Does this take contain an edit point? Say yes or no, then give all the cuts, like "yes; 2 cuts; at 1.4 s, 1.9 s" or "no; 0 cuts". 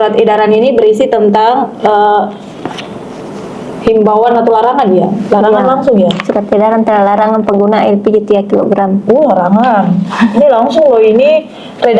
no; 0 cuts